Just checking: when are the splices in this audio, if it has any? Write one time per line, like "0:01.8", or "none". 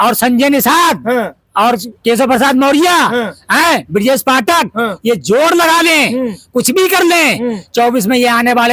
none